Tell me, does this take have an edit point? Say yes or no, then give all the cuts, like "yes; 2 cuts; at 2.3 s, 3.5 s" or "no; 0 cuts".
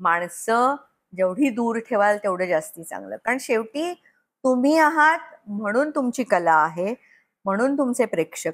no; 0 cuts